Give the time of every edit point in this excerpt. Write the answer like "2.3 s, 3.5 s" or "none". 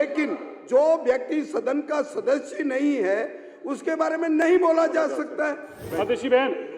5.8 s